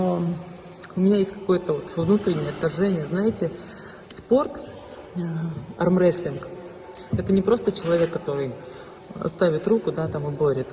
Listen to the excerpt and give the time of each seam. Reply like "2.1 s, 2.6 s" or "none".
none